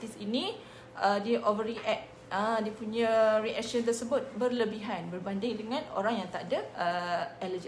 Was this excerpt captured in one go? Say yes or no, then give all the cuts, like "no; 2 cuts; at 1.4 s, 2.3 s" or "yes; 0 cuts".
no; 1 cut; at 6.7 s